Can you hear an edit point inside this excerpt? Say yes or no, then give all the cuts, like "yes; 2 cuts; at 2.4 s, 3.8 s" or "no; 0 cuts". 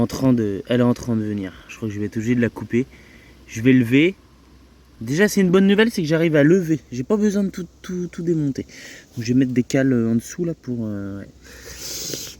no; 0 cuts